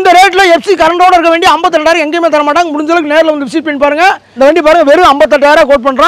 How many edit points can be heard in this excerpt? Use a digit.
1